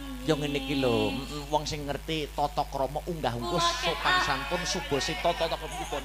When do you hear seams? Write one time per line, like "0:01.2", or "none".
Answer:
none